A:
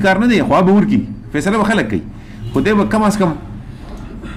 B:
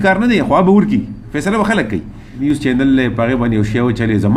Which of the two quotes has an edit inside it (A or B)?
B